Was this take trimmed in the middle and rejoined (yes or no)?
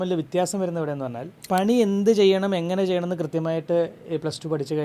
yes